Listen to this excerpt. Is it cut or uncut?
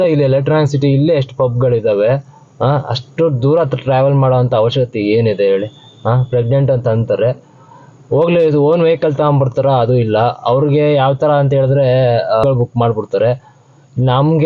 cut